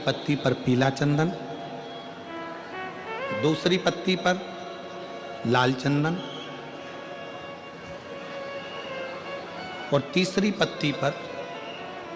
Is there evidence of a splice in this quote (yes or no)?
no